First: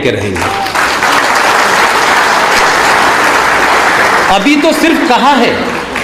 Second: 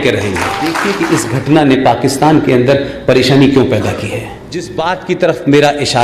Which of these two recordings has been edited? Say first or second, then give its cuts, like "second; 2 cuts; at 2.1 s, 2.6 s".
second; 2 cuts; at 0.8 s, 4.7 s